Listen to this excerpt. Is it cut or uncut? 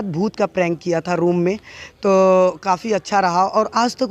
uncut